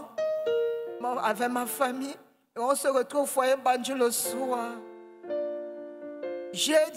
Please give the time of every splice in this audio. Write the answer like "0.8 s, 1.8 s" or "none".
none